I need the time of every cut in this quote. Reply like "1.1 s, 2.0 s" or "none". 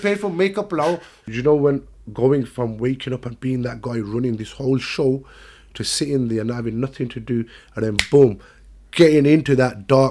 1.1 s